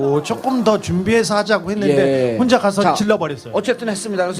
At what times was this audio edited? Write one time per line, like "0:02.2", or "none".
0:00.9